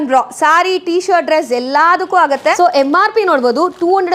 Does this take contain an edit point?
yes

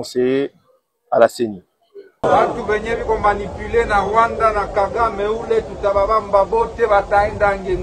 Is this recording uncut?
no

